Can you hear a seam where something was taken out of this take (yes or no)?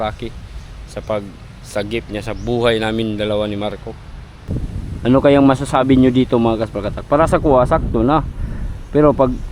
yes